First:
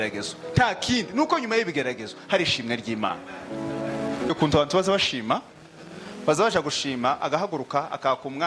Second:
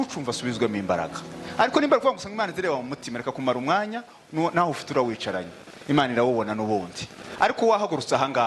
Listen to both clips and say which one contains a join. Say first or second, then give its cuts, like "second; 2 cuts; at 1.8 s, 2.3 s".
first; 1 cut; at 4.3 s